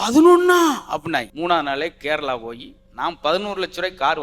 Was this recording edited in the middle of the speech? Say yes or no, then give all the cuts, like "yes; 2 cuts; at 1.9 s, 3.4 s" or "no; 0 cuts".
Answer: yes; 1 cut; at 1.3 s